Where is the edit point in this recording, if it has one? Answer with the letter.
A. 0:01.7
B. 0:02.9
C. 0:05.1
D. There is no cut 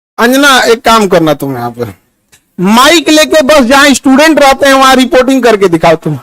D